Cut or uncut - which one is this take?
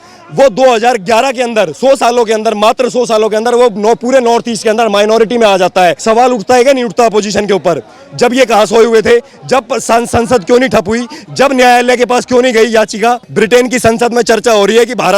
cut